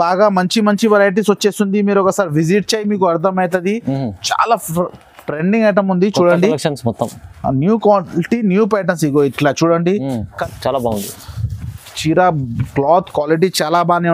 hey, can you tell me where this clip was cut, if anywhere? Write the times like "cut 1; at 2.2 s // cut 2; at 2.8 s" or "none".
cut 1; at 10.4 s